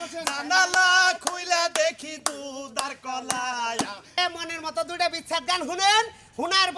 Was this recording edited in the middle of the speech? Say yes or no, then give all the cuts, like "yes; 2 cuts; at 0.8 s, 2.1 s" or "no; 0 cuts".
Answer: yes; 1 cut; at 4.2 s